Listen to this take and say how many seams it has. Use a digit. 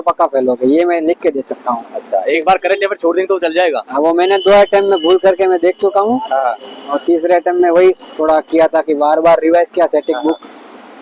0